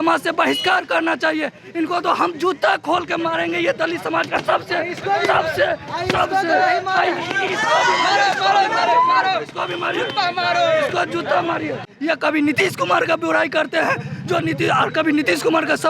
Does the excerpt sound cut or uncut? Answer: cut